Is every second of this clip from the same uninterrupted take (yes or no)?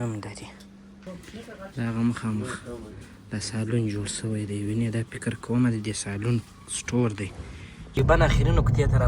no